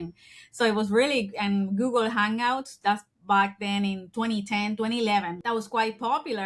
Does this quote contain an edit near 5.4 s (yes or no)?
yes